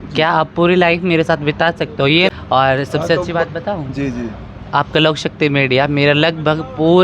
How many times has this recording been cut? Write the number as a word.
one